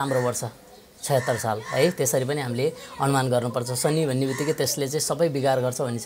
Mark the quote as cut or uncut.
uncut